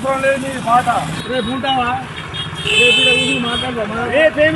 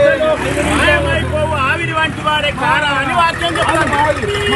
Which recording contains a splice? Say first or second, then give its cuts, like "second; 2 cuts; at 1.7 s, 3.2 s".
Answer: first; 1 cut; at 1.2 s